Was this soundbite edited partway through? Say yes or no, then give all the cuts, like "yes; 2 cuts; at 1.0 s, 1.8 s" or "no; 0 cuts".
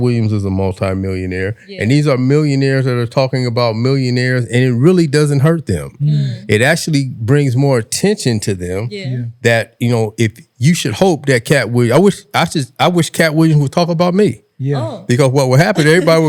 no; 0 cuts